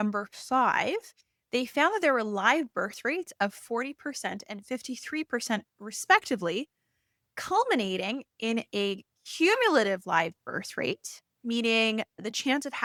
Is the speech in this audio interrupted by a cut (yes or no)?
no